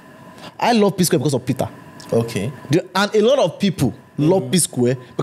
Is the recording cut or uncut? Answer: uncut